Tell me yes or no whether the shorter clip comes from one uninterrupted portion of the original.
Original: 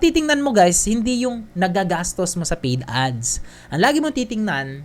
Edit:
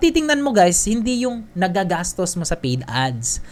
yes